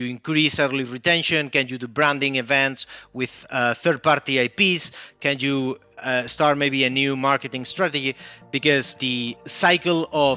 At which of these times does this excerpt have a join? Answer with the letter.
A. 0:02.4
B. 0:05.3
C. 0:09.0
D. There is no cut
C